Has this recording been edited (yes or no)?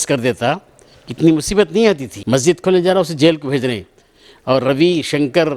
yes